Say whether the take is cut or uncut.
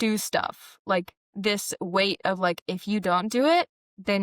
cut